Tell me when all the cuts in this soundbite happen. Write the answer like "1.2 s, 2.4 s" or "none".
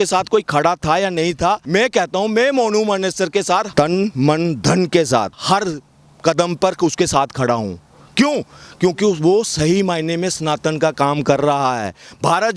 1.6 s, 3.7 s, 5.4 s

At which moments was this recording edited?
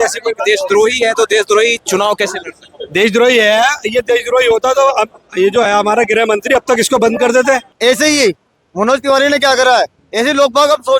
7.7 s

